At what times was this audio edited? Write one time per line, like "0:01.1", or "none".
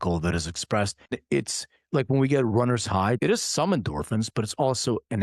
0:01.2
0:03.2